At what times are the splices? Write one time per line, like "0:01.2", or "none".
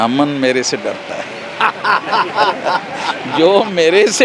none